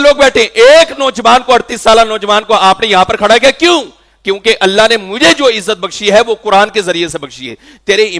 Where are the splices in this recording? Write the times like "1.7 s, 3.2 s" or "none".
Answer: none